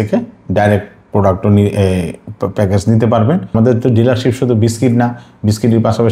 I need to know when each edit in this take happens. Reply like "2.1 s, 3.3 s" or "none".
3.5 s